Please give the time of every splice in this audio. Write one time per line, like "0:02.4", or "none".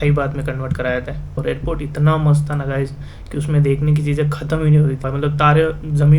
0:01.4
0:05.0